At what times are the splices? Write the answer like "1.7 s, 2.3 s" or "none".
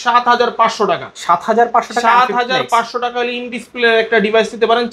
none

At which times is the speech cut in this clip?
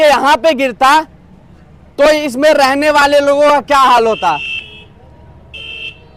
none

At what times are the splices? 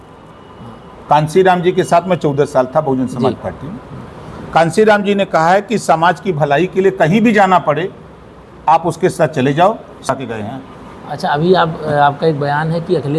10.1 s

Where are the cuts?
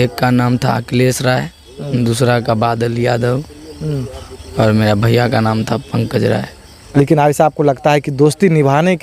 6.8 s

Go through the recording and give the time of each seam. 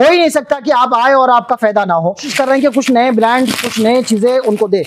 2.3 s

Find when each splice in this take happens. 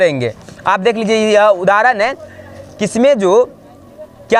none

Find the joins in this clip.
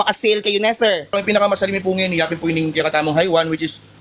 1.2 s

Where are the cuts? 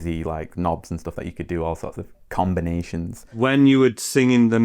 3.2 s

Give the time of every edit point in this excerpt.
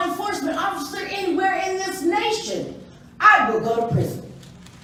none

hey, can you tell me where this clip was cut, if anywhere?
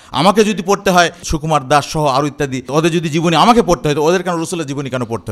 2.6 s

